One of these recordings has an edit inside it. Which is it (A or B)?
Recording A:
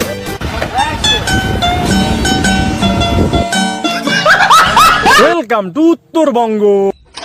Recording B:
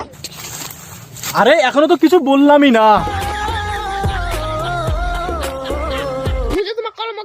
A